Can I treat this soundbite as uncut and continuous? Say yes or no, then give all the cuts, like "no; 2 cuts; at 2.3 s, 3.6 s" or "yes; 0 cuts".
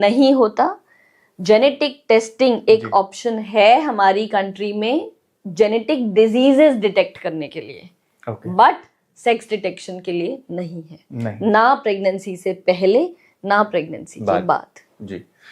yes; 0 cuts